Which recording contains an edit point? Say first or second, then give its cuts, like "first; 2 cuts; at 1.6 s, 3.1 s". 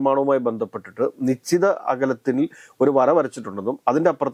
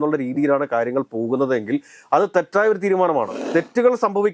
second; 1 cut; at 3.4 s